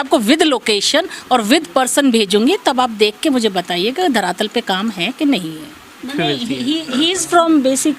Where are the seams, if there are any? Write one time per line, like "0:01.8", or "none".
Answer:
0:06.1